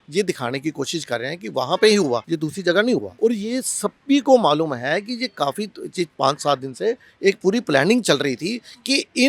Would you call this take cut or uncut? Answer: cut